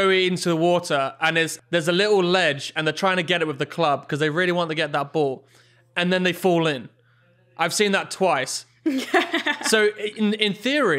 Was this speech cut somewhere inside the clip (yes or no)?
yes